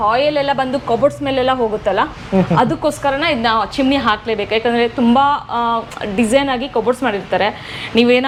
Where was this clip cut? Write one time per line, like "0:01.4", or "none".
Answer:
none